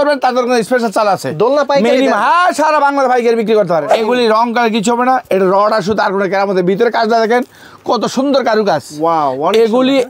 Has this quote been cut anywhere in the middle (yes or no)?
yes